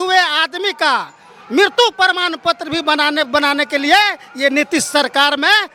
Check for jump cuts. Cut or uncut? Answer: uncut